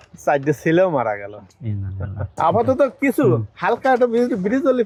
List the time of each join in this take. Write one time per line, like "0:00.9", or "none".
none